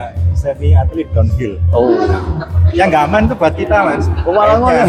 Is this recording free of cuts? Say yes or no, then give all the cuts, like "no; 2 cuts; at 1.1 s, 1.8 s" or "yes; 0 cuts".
yes; 0 cuts